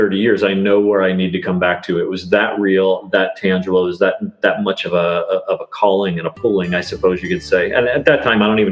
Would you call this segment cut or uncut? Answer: uncut